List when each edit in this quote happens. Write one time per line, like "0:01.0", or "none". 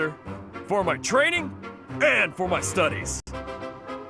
0:03.2